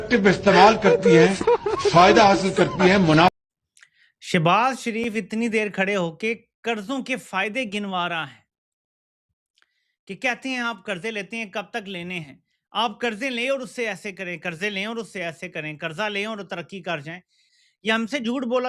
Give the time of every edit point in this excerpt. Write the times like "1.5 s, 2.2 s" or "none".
3.3 s